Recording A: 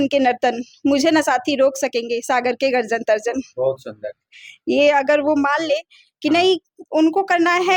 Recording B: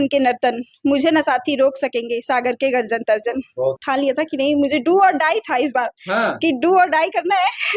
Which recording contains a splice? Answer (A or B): B